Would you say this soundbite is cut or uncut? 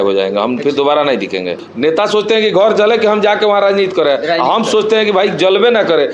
cut